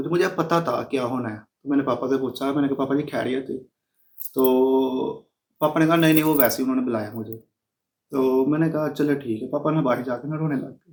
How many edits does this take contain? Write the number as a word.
zero